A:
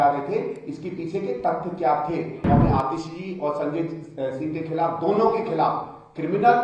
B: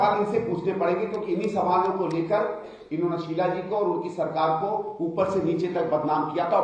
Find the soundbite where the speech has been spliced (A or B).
A